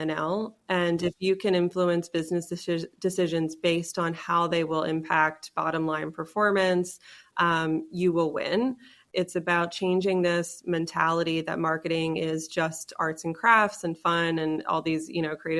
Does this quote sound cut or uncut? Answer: cut